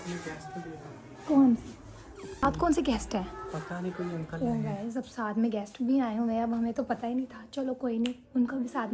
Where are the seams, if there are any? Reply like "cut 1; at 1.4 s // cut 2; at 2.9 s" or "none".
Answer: none

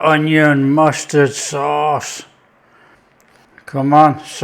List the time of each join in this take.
cut 1; at 3.4 s

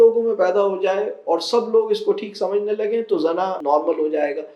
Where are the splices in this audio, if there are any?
cut 1; at 3.6 s

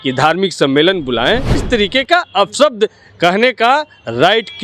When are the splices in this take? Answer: cut 1; at 1.6 s

